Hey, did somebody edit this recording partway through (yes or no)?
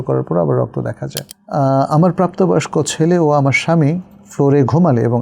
yes